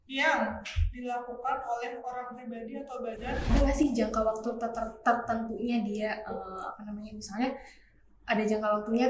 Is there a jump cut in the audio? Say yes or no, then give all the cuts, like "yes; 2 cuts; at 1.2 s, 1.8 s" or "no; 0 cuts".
yes; 1 cut; at 3.5 s